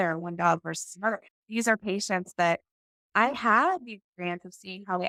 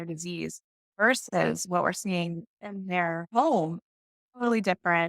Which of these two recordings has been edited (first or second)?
second